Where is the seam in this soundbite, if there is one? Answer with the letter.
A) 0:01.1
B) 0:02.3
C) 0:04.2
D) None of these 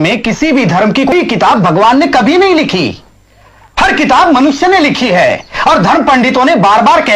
A